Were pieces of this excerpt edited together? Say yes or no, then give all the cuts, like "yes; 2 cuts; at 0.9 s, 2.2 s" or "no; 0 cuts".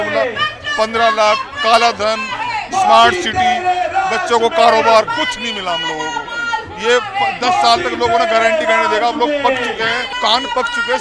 yes; 1 cut; at 10.1 s